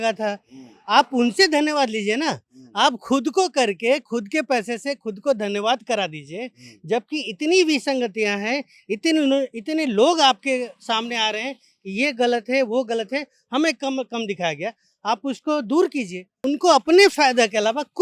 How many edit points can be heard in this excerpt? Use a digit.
1